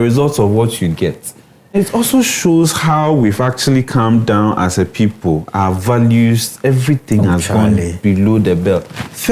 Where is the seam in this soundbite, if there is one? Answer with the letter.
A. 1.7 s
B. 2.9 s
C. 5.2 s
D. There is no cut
A